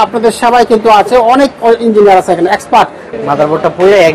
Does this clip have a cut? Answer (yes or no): yes